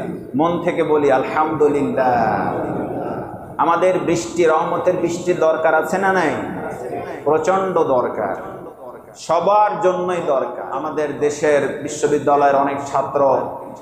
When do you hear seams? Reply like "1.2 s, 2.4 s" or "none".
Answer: 10.7 s